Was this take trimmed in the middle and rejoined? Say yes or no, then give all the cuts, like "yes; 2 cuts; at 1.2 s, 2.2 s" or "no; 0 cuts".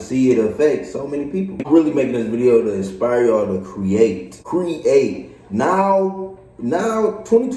yes; 2 cuts; at 1.6 s, 4.3 s